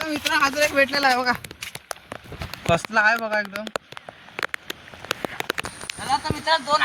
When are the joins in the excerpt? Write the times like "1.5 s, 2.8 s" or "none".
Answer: 5.6 s